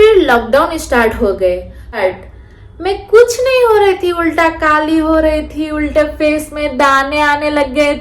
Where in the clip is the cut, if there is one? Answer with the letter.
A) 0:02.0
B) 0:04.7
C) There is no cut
A